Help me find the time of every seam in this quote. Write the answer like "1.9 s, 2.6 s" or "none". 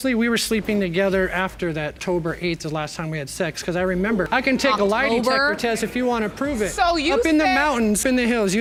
none